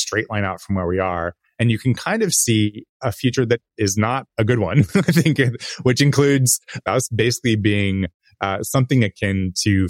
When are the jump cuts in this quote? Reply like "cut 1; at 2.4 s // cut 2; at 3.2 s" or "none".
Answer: cut 1; at 6.8 s